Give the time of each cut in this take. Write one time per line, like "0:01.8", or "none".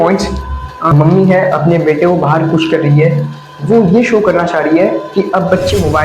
0:00.9